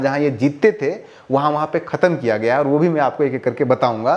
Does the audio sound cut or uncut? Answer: uncut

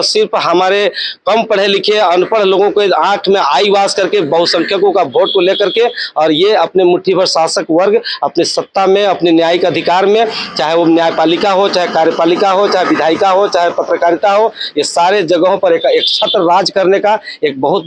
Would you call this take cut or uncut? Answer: uncut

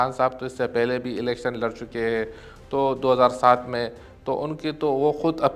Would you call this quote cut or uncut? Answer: uncut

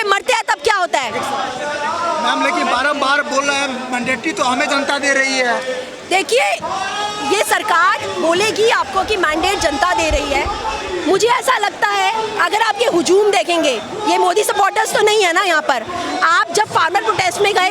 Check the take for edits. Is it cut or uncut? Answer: uncut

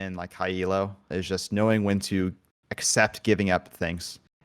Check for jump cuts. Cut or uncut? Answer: cut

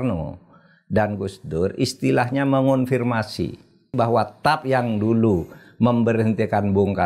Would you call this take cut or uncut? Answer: cut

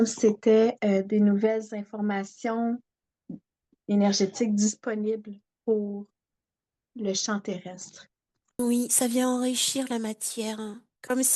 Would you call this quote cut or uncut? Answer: cut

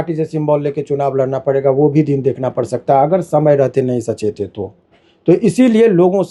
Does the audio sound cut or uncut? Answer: uncut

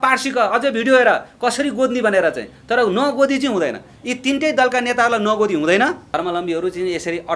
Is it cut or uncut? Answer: cut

